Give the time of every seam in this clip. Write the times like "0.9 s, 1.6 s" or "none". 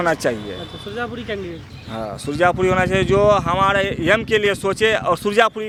none